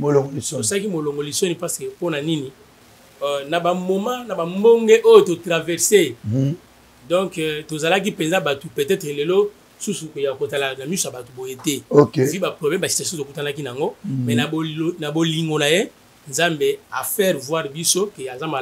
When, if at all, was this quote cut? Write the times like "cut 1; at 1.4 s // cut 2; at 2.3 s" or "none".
none

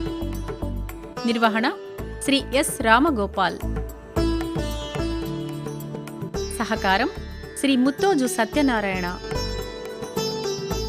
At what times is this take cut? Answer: cut 1; at 1.0 s // cut 2; at 3.7 s // cut 3; at 6.2 s // cut 4; at 9.2 s

